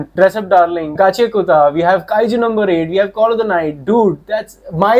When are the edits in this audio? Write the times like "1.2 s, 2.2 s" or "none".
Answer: 0.9 s

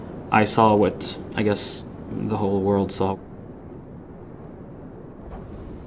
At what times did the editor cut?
3.2 s

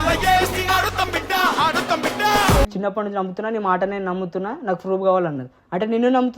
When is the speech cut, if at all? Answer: 2.7 s

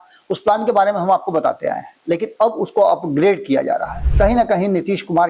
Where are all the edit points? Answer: 4.0 s

